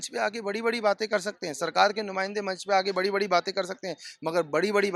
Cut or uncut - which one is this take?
uncut